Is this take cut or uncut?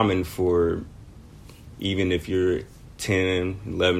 uncut